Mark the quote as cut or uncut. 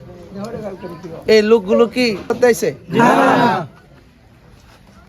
cut